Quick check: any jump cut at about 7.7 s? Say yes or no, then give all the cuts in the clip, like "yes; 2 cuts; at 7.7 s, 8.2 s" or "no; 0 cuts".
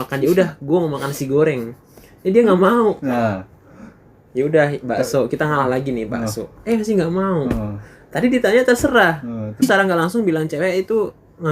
no; 1 cut; at 9.6 s